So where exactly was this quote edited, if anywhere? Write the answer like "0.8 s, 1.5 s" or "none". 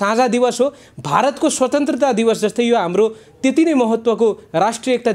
none